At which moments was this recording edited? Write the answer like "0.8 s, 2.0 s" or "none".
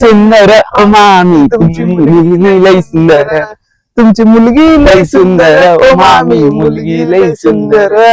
none